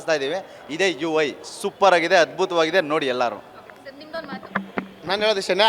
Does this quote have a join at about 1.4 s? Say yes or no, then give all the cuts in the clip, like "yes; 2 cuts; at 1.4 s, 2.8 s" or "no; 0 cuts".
no; 0 cuts